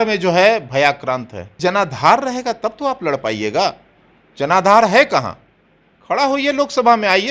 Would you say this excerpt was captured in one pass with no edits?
no; 1 cut; at 1.5 s

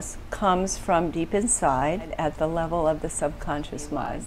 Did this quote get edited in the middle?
yes; 1 cut; at 2.1 s

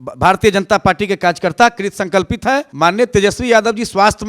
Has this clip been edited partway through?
yes; 1 cut; at 2.7 s

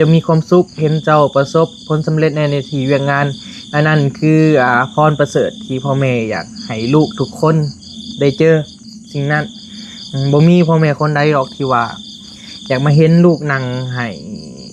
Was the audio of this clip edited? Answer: no; 0 cuts

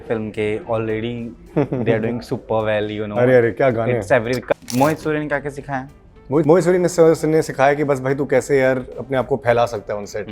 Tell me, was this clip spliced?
yes; 2 cuts; at 4.5 s, 6.4 s

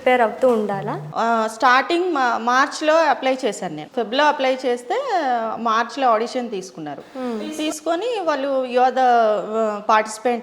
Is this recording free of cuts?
yes; 0 cuts

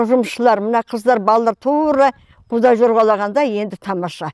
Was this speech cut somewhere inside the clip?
no; 0 cuts

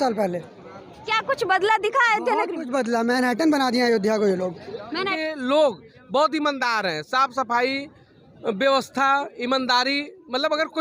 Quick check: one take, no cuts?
no; 1 cut; at 5.1 s

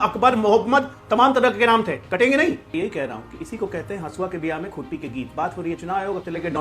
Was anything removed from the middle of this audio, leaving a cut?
yes; 1 cut; at 2.7 s

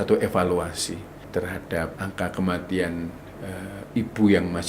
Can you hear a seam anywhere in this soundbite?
yes; 2 cuts; at 1.1 s, 1.9 s

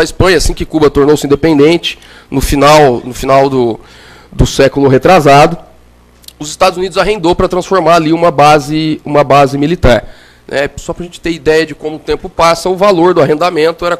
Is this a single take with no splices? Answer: no; 1 cut; at 7.2 s

